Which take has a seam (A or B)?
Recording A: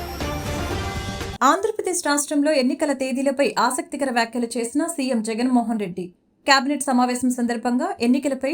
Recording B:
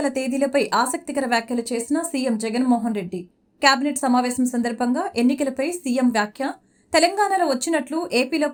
A